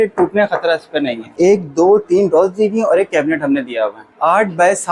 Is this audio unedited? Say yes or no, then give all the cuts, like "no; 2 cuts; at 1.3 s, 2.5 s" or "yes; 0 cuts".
no; 2 cuts; at 1.3 s, 4.1 s